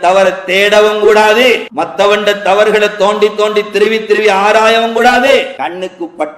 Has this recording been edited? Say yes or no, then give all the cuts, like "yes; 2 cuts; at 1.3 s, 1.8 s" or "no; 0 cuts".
yes; 2 cuts; at 1.7 s, 5.3 s